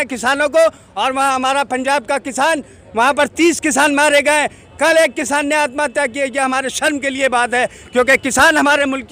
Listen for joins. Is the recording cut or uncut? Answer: uncut